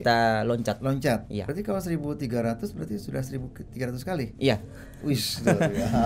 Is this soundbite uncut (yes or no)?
no